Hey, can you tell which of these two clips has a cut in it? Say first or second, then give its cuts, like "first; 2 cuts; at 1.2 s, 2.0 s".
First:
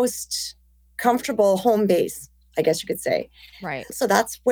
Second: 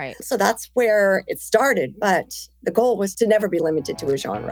second; 1 cut; at 3.1 s